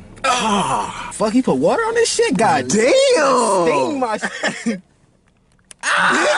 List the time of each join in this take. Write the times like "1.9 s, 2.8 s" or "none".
1.0 s